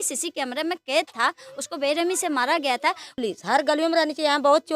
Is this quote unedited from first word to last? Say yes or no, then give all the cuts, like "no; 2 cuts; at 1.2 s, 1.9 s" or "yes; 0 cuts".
no; 1 cut; at 3.1 s